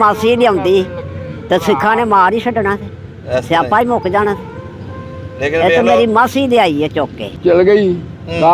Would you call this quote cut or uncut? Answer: cut